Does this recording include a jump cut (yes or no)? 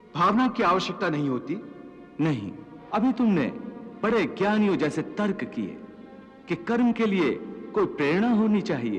yes